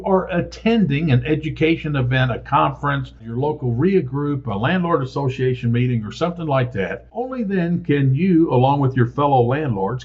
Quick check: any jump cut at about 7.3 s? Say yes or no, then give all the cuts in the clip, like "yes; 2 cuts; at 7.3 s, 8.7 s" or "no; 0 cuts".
yes; 2 cuts; at 3.2 s, 7.3 s